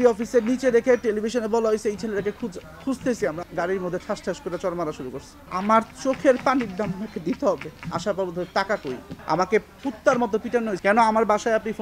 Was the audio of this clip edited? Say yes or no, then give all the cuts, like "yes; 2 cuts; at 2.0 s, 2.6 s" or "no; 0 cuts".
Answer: yes; 5 cuts; at 3.4 s, 5.3 s, 7.8 s, 9.1 s, 10.8 s